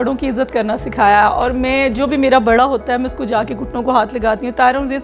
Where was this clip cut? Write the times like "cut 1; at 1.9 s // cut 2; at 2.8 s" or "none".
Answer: none